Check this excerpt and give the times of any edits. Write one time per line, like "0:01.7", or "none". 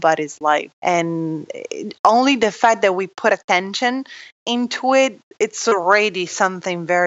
none